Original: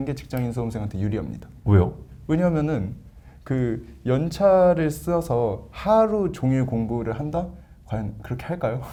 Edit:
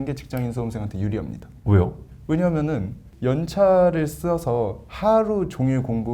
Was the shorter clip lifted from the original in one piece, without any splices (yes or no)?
no